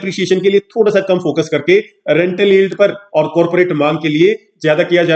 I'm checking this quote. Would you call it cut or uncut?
uncut